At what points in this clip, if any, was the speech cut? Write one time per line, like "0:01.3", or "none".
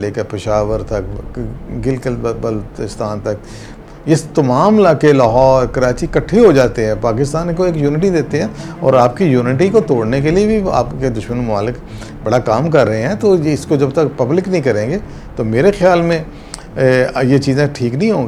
none